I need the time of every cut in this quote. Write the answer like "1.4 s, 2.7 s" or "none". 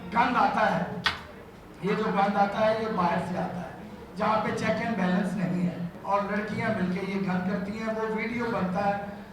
5.9 s